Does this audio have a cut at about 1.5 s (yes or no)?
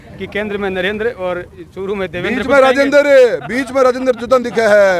no